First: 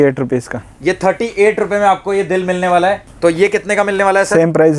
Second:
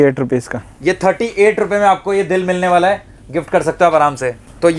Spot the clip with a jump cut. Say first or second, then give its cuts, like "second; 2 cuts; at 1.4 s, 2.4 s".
first; 1 cut; at 3.1 s